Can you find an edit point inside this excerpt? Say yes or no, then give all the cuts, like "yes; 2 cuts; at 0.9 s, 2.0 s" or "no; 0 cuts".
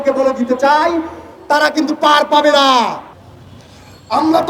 yes; 1 cut; at 3.1 s